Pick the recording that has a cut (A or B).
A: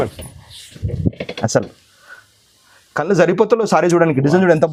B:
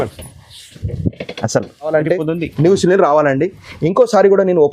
B